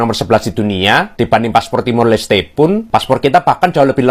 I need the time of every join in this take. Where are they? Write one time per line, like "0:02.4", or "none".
none